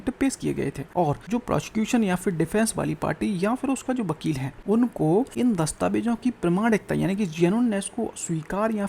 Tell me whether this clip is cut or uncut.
cut